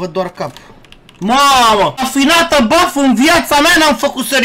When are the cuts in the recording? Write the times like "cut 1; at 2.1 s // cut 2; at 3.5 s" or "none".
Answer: cut 1; at 2.1 s